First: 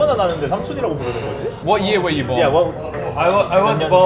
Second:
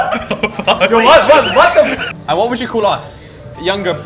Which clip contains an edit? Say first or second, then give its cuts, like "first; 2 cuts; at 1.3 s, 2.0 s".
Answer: second; 1 cut; at 2.0 s